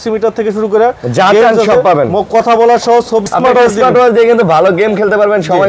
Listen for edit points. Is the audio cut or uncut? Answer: cut